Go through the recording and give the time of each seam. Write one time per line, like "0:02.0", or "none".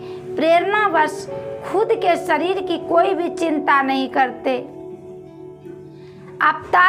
none